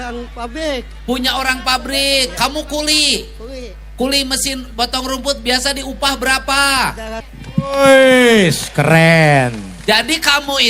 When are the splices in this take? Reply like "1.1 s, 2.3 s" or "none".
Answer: 7.3 s